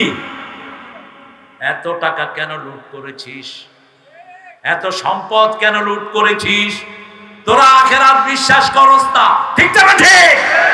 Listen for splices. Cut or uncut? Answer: uncut